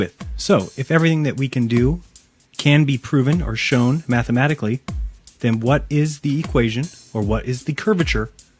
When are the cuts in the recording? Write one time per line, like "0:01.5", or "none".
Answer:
none